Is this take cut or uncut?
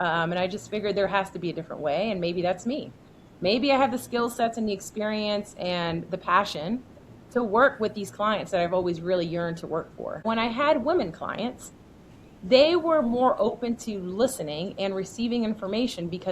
cut